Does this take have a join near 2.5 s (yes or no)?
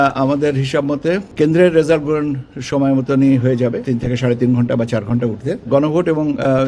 no